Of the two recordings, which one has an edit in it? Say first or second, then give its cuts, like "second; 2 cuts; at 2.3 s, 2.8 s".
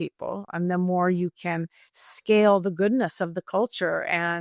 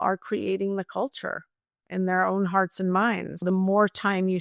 second; 1 cut; at 3.3 s